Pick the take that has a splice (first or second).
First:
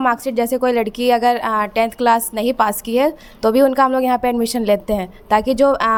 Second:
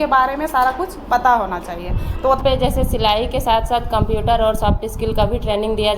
second